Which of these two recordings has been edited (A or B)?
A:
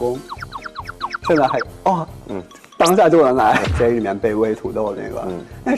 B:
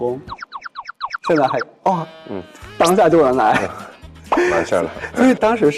A